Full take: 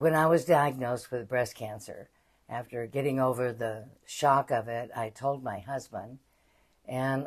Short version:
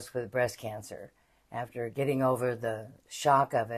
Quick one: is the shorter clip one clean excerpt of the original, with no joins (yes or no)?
yes